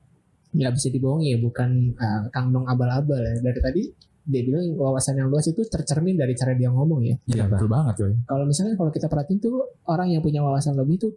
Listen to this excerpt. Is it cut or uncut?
uncut